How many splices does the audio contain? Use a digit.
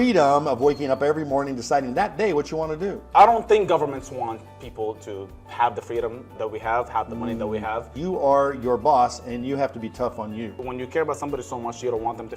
3